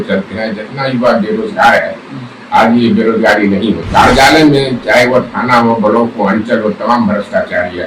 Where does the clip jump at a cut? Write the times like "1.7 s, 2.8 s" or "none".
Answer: 3.8 s

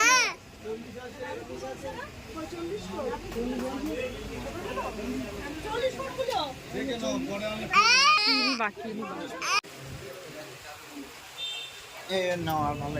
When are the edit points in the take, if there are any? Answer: 8.2 s, 9.7 s

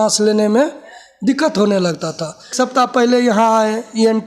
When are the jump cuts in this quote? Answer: 2.5 s

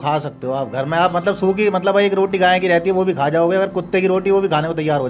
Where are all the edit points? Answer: none

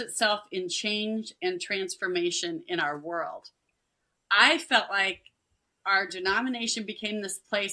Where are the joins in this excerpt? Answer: 6.1 s

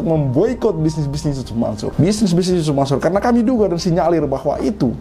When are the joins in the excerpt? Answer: 1.9 s

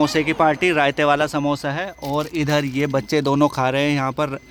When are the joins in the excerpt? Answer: none

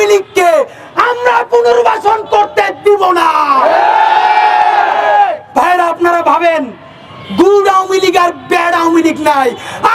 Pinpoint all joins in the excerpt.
none

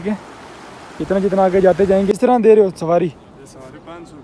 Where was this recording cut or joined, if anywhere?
2.1 s

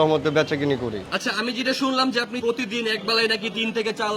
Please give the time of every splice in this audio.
1.1 s, 2.4 s

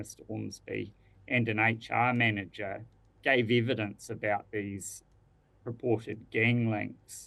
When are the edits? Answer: 1.4 s

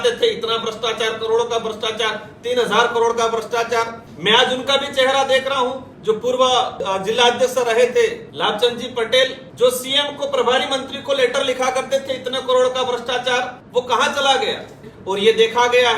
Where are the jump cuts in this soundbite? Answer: 4.0 s, 5.9 s, 6.8 s, 8.3 s, 9.4 s, 13.6 s, 14.9 s

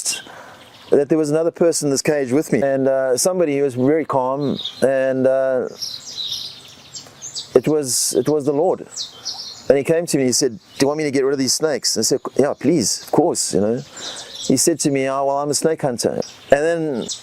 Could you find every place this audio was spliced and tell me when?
16.2 s

